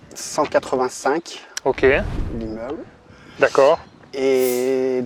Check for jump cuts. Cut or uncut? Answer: uncut